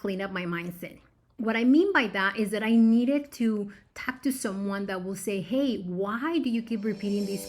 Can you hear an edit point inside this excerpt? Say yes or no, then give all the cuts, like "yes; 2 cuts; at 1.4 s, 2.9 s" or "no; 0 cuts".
yes; 1 cut; at 1.3 s